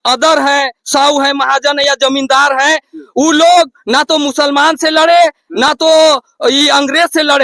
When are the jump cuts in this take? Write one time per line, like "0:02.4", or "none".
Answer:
none